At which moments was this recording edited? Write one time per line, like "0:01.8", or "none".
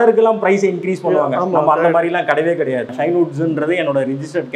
0:02.9